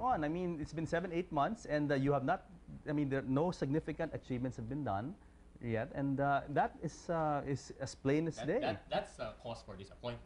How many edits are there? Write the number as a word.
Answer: zero